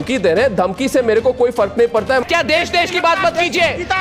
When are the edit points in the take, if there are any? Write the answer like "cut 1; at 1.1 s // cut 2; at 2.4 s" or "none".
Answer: cut 1; at 2.2 s